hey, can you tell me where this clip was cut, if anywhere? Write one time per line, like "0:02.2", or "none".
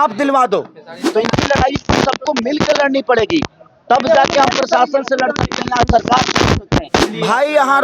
0:01.0
0:07.0